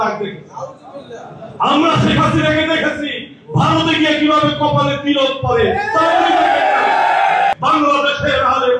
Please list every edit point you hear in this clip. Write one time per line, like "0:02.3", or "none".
0:07.6

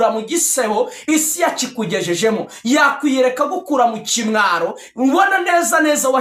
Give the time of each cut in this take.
none

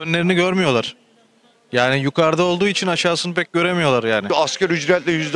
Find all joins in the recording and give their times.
0:04.3

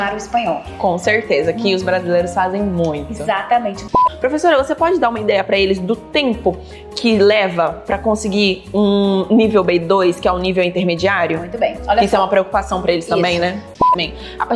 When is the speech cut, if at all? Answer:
0:04.0
0:13.8

